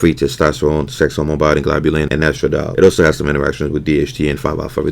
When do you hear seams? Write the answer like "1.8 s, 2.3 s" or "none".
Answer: 2.4 s